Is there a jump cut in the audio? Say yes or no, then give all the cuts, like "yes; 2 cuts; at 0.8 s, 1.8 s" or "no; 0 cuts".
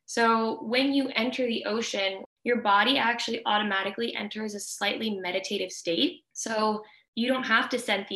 yes; 3 cuts; at 2.2 s, 6.4 s, 7.0 s